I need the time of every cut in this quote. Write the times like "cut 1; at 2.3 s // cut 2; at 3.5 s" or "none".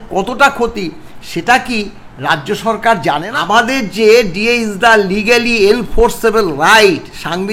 cut 1; at 3.3 s